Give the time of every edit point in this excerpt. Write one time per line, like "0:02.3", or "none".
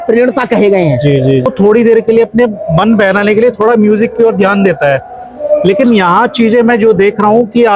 0:01.5